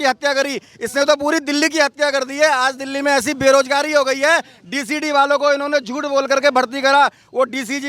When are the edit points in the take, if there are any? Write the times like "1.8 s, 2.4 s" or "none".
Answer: none

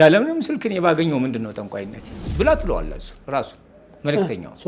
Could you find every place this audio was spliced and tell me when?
2.2 s

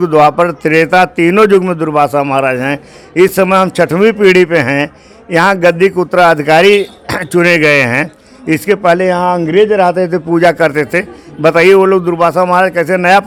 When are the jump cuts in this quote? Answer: none

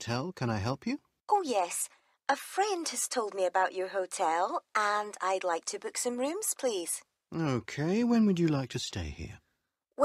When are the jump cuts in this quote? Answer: 1.1 s

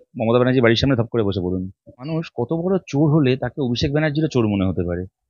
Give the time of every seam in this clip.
2.1 s

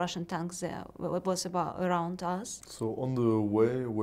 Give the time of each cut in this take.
2.6 s

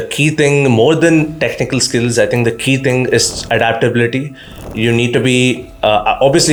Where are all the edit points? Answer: none

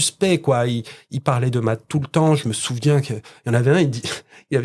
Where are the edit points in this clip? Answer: none

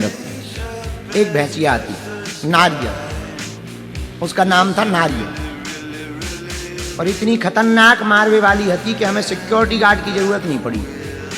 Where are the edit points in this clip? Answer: 5.8 s, 7.0 s

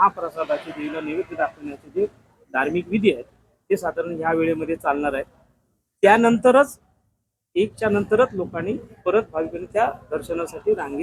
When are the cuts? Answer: none

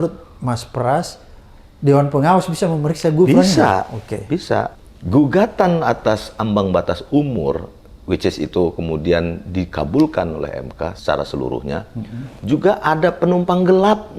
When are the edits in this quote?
4.7 s, 11.0 s

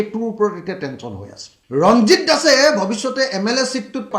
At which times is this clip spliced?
none

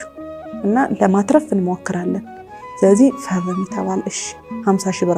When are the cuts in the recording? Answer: none

